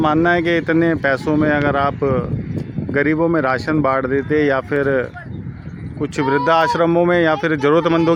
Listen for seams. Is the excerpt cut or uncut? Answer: uncut